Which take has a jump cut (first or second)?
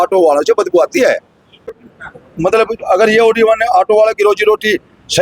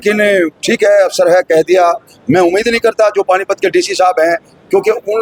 first